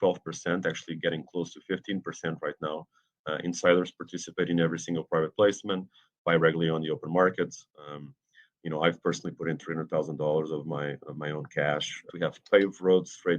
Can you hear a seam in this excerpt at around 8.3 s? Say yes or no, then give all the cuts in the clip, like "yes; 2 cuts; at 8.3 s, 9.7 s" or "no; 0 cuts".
no; 1 cut; at 12.0 s